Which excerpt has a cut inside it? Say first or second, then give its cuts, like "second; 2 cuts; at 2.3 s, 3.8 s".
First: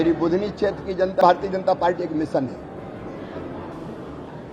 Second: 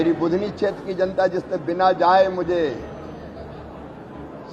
first; 1 cut; at 1.2 s